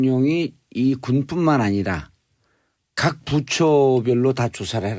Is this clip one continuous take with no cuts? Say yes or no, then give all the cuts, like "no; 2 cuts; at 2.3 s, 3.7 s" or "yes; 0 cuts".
yes; 0 cuts